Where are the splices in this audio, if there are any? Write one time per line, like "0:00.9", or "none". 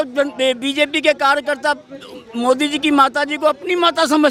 none